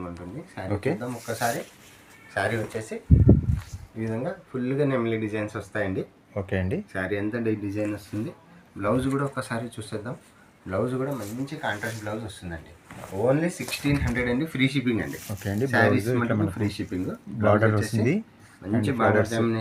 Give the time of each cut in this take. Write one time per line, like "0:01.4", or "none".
none